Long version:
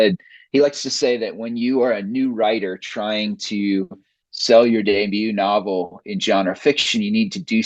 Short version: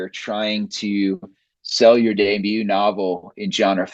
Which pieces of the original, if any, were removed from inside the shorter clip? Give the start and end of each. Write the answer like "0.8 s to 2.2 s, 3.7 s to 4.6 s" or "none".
none